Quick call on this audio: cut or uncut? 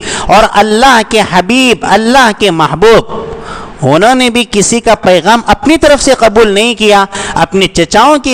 uncut